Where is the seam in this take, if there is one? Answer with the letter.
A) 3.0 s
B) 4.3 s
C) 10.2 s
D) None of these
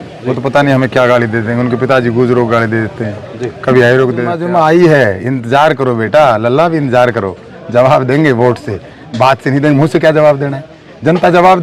B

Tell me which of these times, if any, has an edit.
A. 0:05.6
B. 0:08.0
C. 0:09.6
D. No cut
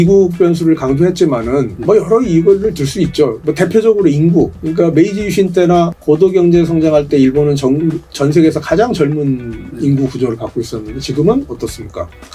D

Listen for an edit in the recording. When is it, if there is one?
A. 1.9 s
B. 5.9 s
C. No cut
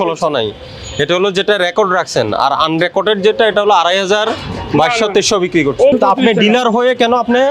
B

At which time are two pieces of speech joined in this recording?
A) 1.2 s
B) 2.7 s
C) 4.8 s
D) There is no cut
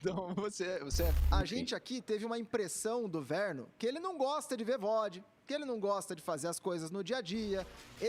A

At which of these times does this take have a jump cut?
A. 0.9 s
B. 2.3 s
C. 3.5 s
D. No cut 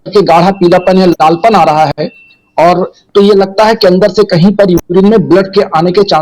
D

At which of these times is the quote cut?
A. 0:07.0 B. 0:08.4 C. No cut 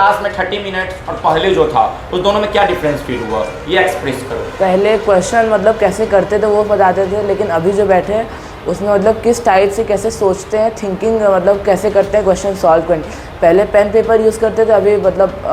C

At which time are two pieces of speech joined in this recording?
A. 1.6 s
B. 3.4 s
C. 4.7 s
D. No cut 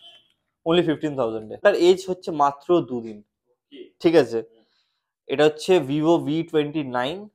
A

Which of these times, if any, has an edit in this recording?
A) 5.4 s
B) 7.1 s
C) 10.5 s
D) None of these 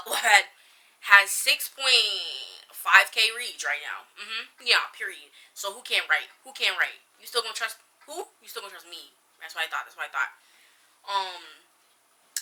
D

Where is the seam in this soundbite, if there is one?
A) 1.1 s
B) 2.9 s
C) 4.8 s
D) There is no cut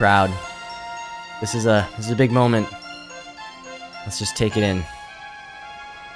C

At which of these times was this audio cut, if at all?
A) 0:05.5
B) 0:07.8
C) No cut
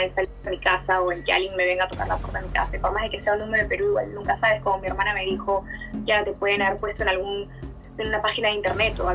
C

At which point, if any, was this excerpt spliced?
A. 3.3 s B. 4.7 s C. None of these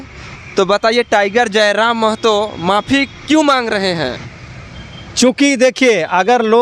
C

